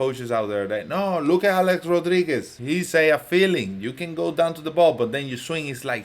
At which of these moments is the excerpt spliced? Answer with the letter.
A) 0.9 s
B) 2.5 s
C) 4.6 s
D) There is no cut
B